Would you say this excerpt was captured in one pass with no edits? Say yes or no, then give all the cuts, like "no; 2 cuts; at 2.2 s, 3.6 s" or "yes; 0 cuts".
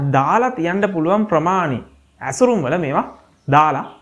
yes; 0 cuts